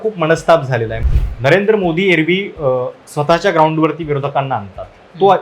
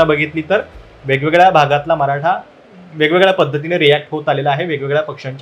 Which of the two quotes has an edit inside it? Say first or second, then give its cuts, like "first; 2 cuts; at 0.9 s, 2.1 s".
first; 1 cut; at 1.0 s